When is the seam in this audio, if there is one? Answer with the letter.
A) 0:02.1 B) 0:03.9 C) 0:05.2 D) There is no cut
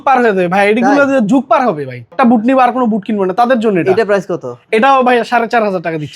A